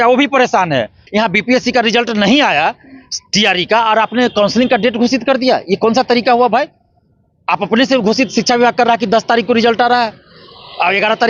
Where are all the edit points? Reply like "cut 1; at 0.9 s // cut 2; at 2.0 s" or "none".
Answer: cut 1; at 1.0 s